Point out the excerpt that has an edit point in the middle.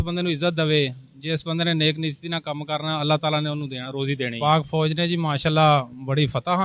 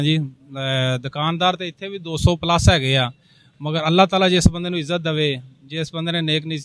first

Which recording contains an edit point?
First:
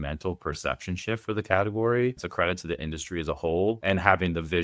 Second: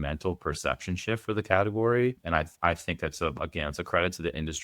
first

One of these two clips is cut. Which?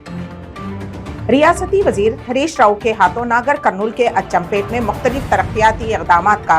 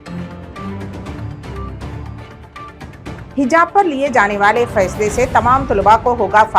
second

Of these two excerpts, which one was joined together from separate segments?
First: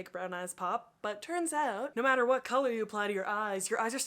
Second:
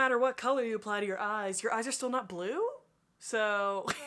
first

